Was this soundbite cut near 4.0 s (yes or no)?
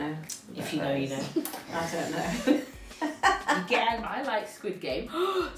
yes